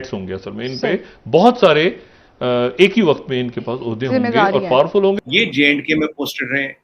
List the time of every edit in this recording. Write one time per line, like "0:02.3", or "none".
0:05.2